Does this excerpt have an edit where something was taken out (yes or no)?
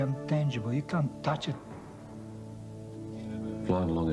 no